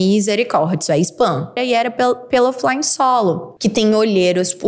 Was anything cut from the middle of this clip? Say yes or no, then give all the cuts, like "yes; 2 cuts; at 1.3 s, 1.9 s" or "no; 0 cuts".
yes; 2 cuts; at 1.6 s, 3.5 s